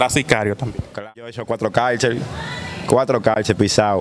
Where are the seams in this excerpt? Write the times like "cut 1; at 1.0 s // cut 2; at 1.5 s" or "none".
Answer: cut 1; at 1.1 s